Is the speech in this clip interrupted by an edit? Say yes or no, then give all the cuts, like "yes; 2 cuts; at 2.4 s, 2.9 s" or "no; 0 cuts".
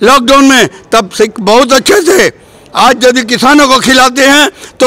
no; 0 cuts